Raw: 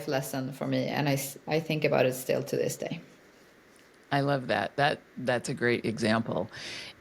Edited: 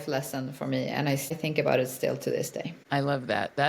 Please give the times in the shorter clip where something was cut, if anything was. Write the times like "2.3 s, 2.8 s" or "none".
1.4 s, 2.8 s